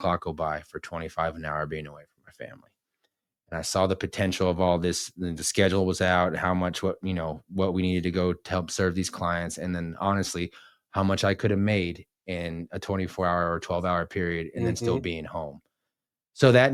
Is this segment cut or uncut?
uncut